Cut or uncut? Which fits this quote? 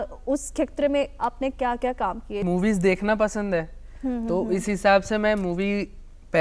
cut